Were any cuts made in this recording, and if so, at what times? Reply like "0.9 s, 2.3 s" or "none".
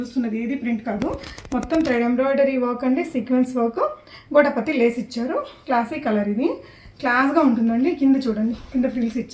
none

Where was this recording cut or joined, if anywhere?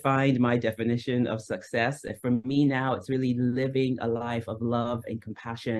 none

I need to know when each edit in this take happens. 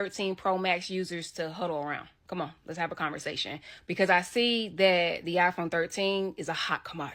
none

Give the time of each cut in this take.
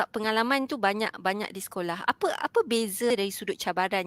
3.1 s

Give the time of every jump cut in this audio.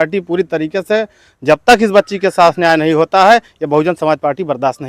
none

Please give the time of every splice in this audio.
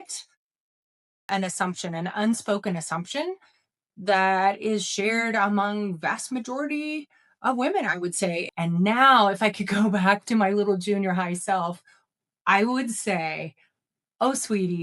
1.3 s, 8.4 s

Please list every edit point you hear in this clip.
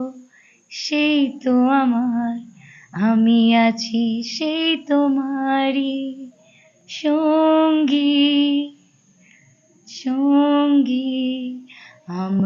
none

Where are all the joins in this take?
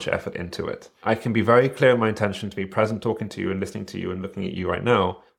0.9 s

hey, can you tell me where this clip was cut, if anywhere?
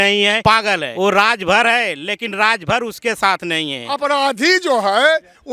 3.8 s

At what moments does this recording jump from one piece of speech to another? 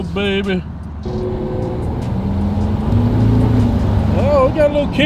1.0 s

